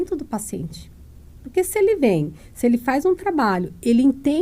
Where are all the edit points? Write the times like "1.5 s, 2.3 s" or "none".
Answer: none